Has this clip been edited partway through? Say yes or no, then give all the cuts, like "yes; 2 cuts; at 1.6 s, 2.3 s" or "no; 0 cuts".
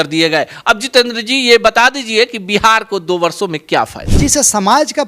yes; 1 cut; at 4.0 s